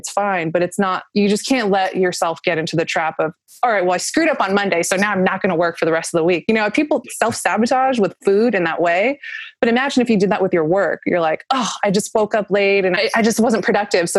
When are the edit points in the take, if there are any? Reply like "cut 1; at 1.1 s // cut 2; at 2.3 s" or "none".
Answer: cut 1; at 7.0 s // cut 2; at 13.0 s